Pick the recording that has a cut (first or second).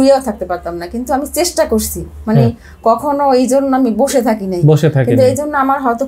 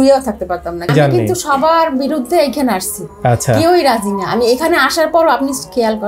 second